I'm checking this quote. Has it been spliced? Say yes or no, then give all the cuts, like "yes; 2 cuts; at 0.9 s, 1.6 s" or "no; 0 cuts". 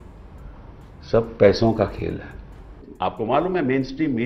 yes; 1 cut; at 3.1 s